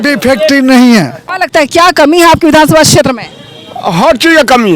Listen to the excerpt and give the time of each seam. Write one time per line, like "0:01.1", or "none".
0:01.4